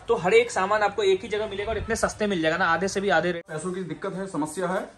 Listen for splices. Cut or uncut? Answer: cut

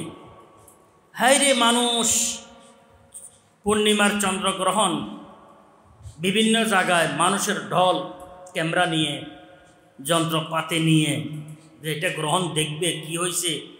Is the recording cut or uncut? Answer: uncut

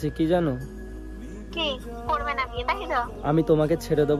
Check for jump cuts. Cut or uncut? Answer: uncut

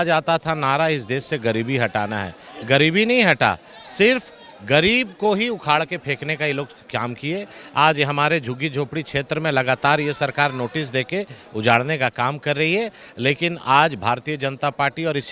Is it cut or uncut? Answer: uncut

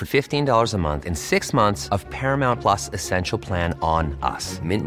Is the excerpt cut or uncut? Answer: uncut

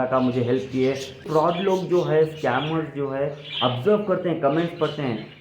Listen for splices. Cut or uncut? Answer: cut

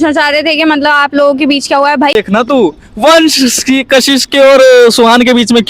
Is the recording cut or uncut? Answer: cut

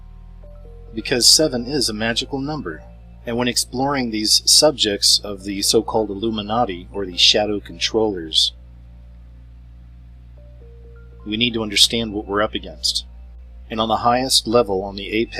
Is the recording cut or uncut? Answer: cut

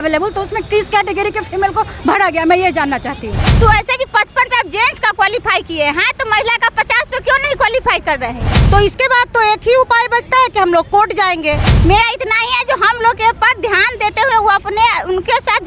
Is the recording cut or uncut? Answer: cut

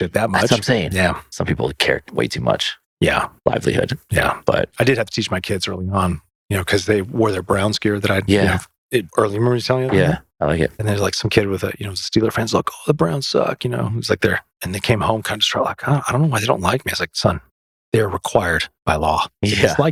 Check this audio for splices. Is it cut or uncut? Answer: uncut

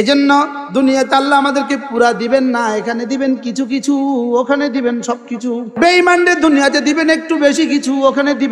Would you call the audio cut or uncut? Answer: cut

